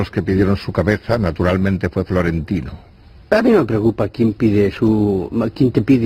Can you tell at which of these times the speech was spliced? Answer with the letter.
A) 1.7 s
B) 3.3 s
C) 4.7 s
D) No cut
B